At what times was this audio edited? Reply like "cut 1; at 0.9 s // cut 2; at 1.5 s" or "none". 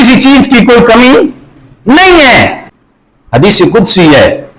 cut 1; at 2.6 s